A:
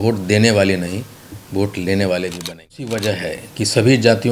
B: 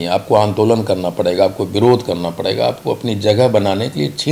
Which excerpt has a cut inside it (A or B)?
A